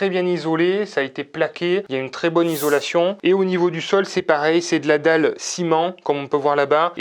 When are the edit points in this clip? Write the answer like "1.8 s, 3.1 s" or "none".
none